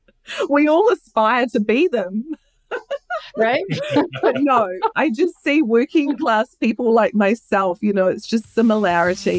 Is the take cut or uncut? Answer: uncut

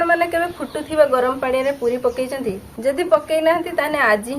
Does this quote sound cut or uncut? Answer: uncut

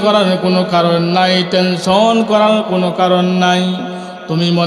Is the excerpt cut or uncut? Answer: uncut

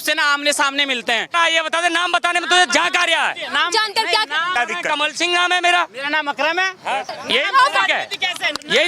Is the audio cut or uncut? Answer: cut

